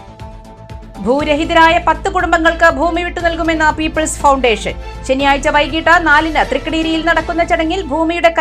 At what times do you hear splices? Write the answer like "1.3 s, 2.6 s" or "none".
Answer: 1.0 s